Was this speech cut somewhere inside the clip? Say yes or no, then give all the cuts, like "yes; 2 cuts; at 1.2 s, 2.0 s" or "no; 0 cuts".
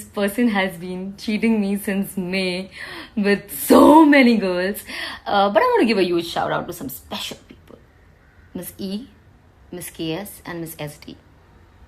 no; 0 cuts